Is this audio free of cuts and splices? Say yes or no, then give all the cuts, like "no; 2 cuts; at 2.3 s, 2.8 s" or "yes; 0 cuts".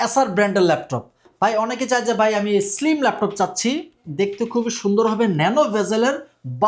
yes; 0 cuts